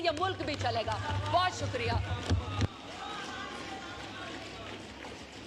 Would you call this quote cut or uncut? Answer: uncut